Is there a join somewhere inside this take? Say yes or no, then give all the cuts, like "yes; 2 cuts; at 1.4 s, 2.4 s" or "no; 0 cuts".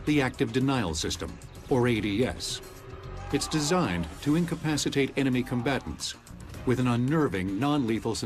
no; 0 cuts